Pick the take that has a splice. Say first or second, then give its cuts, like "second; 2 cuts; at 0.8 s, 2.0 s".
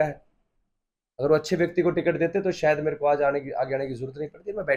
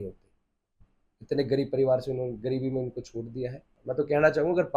second; 1 cut; at 3.7 s